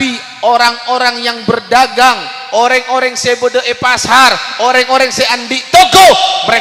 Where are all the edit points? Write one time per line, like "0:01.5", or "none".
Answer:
none